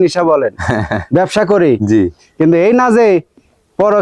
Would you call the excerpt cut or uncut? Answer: uncut